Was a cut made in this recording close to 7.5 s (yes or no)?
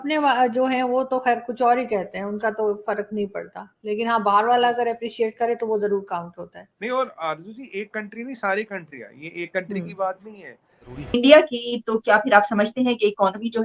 no